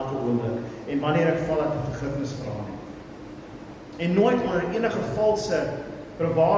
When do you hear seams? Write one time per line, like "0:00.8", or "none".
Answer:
0:03.7